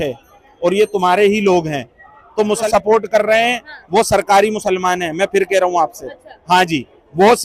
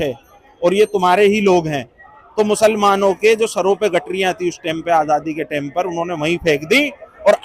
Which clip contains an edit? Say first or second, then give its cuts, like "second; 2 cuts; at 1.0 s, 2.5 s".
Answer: first; 1 cut; at 2.7 s